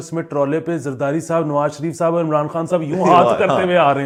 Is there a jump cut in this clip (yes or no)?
no